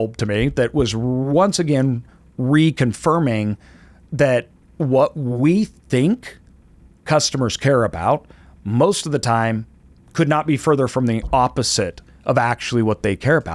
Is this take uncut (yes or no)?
yes